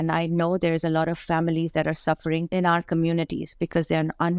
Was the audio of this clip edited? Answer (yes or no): yes